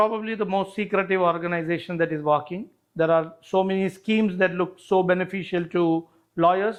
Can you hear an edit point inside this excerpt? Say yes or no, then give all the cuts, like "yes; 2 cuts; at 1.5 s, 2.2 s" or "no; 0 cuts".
no; 0 cuts